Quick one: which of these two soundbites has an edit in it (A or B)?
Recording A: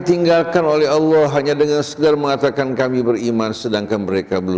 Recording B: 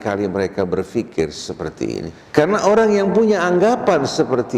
B